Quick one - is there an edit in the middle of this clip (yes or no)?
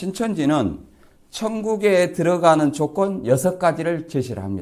no